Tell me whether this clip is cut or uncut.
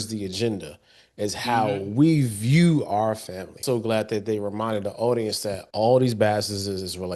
cut